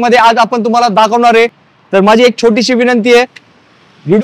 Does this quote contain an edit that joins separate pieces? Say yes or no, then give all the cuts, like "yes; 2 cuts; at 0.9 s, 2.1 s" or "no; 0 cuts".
no; 0 cuts